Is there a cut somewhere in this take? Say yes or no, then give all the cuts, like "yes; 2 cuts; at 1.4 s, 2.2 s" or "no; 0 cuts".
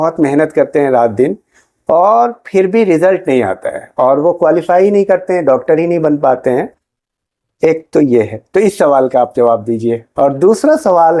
no; 0 cuts